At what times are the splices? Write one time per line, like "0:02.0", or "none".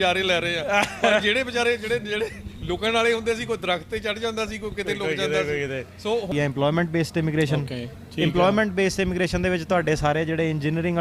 0:06.3